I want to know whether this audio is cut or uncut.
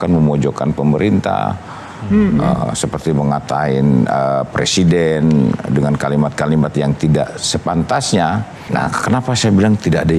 uncut